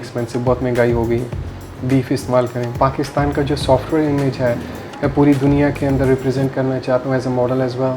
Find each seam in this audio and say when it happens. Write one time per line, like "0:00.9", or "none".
0:02.7